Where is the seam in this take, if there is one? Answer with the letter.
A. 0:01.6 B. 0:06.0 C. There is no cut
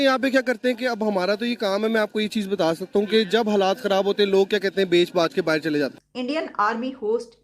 B